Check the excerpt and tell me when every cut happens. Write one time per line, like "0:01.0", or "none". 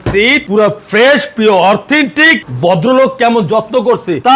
0:02.4